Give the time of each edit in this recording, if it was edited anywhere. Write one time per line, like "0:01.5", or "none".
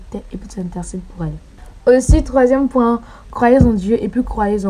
none